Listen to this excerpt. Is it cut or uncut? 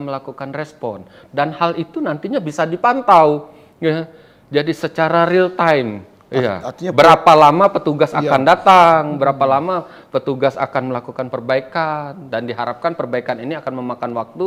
uncut